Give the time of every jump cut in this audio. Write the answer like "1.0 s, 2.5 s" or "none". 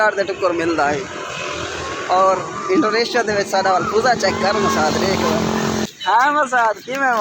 5.9 s